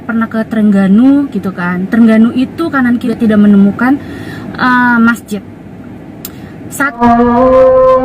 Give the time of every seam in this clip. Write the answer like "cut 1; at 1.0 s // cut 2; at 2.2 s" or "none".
cut 1; at 3.1 s // cut 2; at 7.0 s